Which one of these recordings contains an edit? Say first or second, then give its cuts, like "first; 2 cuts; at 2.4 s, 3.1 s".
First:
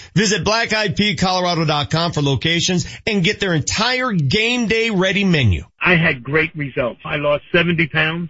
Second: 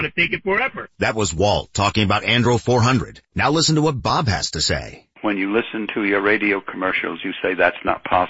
first; 1 cut; at 5.7 s